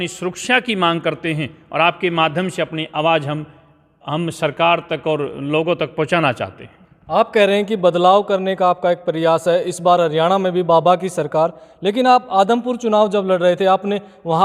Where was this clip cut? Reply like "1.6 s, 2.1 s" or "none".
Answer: none